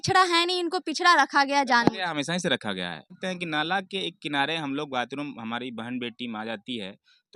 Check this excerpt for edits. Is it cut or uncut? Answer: cut